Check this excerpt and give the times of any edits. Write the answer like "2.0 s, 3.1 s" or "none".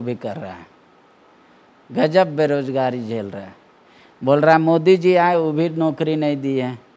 none